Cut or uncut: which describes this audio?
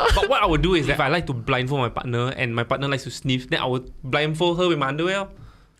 cut